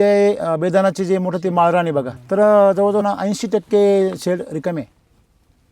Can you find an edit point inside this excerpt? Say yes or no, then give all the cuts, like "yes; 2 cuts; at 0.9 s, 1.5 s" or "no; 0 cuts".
yes; 2 cuts; at 2.2 s, 3.0 s